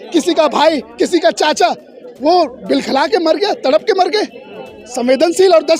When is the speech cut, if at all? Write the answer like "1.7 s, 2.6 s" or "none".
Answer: none